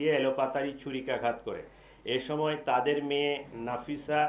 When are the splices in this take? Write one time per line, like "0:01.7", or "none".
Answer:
none